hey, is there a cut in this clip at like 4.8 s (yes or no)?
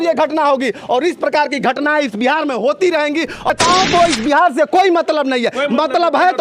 no